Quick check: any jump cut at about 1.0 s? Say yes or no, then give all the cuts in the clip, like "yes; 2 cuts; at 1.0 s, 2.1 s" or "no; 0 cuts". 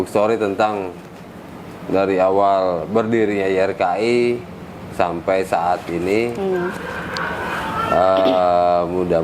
no; 0 cuts